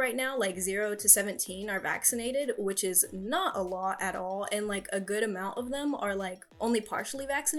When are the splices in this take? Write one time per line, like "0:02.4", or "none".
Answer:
none